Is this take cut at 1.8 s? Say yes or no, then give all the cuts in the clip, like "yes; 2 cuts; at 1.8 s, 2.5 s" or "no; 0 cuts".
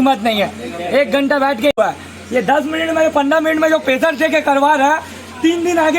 yes; 1 cut; at 1.8 s